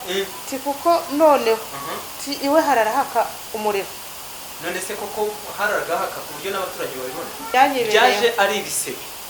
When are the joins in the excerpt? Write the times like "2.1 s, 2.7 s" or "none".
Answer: 7.5 s